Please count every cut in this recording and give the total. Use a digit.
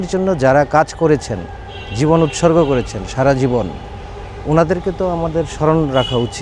0